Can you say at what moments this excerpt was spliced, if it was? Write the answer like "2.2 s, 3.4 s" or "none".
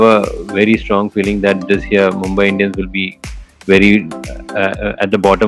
none